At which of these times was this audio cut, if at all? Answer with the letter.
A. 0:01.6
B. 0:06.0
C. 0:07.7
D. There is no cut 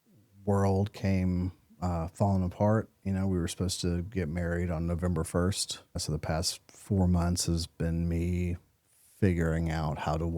B